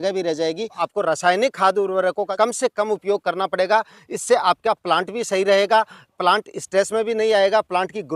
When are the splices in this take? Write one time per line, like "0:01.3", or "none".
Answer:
0:00.8
0:02.3